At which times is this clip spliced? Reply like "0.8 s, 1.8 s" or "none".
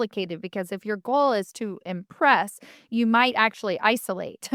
none